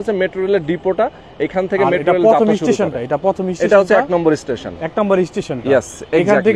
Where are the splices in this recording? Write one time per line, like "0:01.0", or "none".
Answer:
none